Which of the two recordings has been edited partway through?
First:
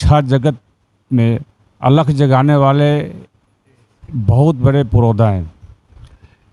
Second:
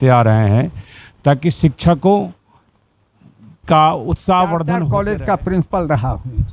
second; 1 cut; at 4.9 s

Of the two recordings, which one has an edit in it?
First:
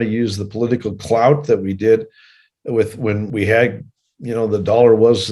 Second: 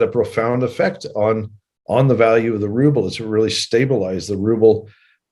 first; 1 cut; at 3.3 s

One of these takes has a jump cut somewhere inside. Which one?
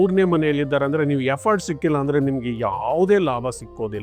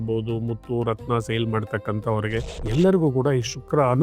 second; 1 cut; at 2.6 s

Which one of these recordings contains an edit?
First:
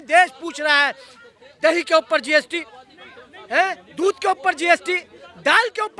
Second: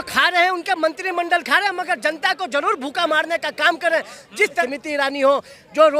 second; 1 cut; at 4.6 s

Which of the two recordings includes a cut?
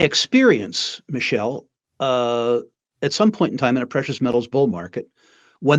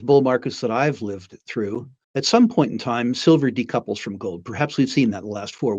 second; 1 cut; at 2.0 s

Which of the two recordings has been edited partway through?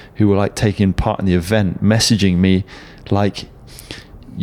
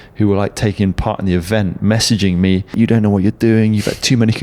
second; 1 cut; at 2.7 s

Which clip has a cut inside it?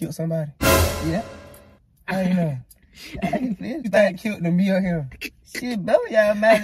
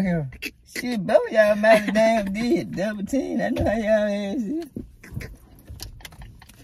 first; 1 cut; at 3.9 s

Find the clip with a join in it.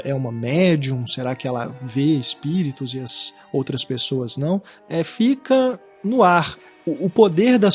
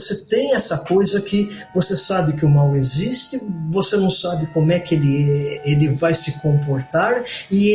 first; 3 cuts; at 4.8 s, 5.9 s, 6.6 s

